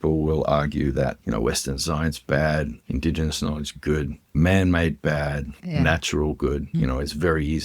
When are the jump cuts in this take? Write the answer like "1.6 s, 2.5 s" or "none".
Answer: 1.2 s, 2.8 s, 4.3 s, 5.6 s, 6.7 s